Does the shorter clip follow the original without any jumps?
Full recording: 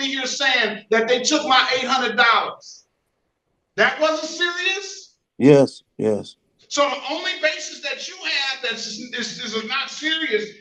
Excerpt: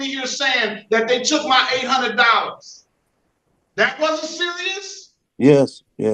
yes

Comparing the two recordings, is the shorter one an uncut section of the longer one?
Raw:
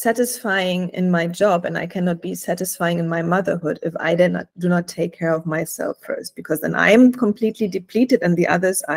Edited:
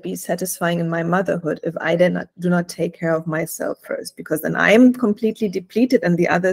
yes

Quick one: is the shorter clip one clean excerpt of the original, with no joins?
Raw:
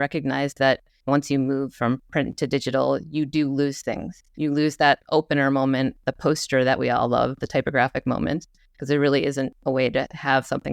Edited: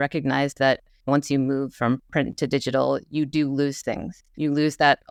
yes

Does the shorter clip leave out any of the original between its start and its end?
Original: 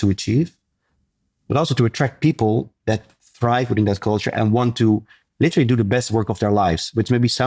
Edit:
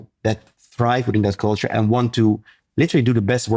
no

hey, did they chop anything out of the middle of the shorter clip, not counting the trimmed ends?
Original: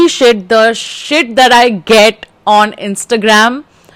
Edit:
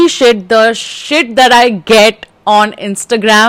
no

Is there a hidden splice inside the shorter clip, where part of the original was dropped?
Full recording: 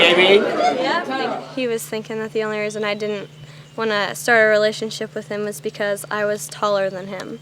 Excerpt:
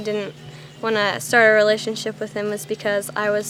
no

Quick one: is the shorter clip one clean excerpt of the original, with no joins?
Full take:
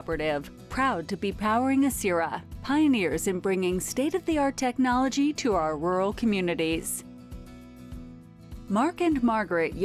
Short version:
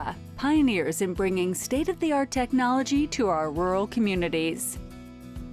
no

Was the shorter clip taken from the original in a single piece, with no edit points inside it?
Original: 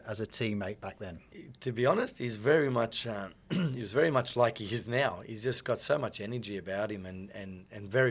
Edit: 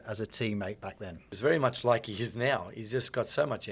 no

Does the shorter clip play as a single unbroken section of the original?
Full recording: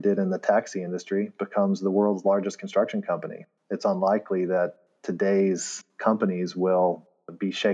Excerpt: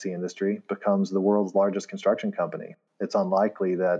yes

